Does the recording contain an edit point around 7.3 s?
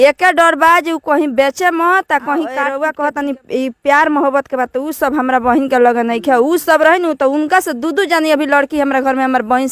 no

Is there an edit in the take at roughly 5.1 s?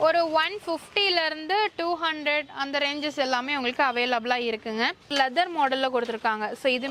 yes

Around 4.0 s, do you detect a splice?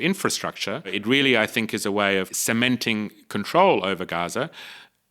no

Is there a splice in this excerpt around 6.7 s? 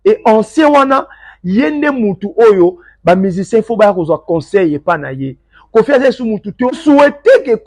yes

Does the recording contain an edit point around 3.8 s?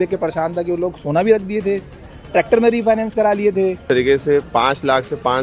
yes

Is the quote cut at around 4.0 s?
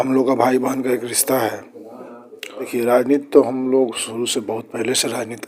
no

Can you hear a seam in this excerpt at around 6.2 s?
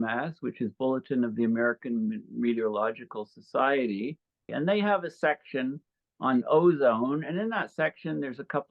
no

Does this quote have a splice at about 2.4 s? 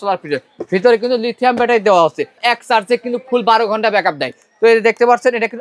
yes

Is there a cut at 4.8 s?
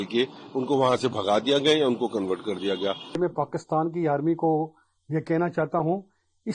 no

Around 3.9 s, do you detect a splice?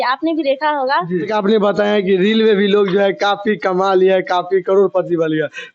no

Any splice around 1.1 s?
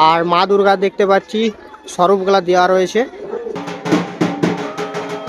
no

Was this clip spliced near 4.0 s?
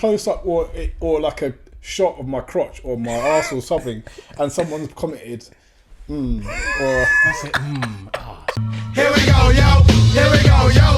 no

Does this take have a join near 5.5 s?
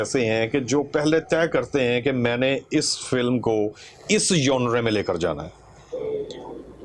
no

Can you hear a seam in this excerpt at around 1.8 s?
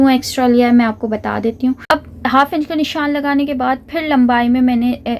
yes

